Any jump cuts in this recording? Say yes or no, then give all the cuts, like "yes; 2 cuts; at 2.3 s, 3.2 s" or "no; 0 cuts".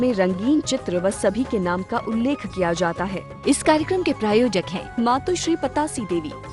yes; 1 cut; at 3.2 s